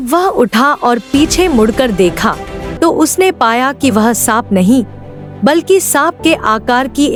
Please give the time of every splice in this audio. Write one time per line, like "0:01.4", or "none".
none